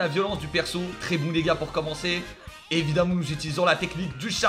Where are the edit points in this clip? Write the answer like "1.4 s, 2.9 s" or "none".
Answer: 1.0 s

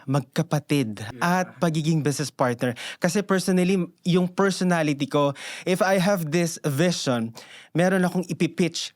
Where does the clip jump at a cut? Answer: 1.1 s

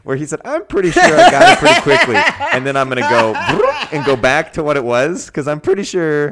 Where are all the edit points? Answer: none

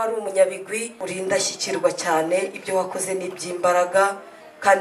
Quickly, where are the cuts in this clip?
1.0 s

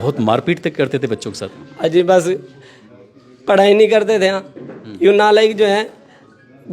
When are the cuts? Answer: none

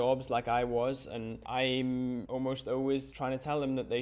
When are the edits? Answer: 1.3 s, 2.2 s, 3.1 s

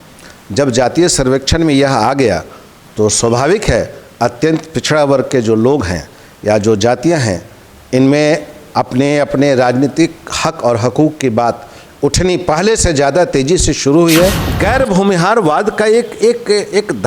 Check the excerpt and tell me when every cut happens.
14.5 s

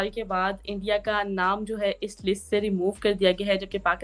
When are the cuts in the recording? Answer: none

